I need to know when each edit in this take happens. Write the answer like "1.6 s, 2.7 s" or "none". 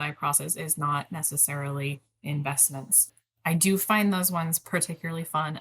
3.0 s